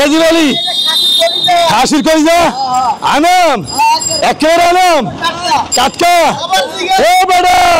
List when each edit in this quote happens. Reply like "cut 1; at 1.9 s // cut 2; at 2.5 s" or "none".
none